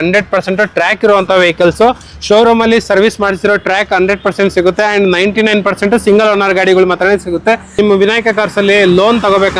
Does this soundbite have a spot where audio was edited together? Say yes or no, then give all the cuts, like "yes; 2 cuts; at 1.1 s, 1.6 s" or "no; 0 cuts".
yes; 1 cut; at 7.7 s